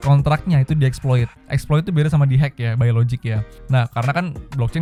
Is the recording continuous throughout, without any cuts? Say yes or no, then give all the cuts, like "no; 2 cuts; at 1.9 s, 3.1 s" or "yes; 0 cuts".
yes; 0 cuts